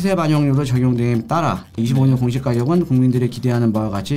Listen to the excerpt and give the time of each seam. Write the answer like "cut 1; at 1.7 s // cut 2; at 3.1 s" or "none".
cut 1; at 1.8 s